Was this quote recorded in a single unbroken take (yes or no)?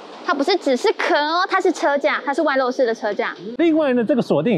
no